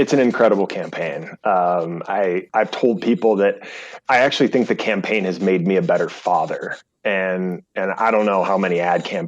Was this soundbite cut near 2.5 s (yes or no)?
yes